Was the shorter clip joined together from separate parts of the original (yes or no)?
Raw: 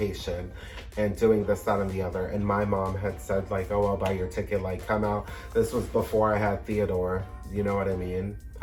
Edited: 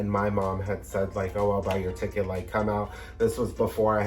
no